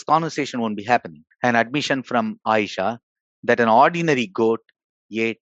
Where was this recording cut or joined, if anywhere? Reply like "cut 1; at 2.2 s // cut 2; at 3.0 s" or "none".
cut 1; at 1.2 s